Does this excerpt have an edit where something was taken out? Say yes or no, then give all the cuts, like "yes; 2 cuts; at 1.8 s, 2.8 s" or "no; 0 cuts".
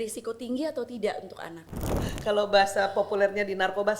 yes; 1 cut; at 1.9 s